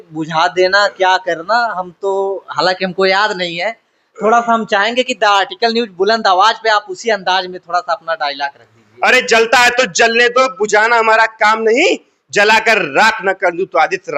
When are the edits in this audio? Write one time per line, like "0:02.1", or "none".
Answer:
none

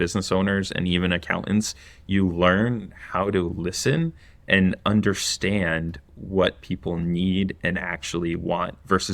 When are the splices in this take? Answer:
none

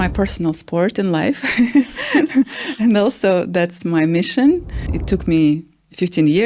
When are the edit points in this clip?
0:05.0

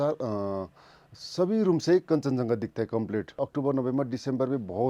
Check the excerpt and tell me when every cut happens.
0:03.3

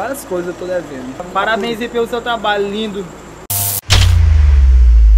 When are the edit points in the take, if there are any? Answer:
0:01.2

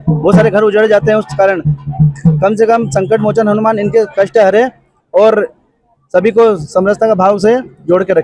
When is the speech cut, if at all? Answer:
none

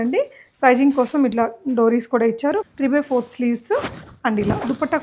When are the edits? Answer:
0:02.6

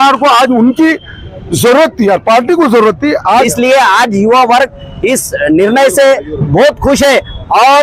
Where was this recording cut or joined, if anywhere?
0:03.5

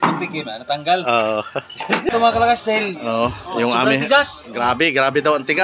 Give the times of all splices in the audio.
0:02.1

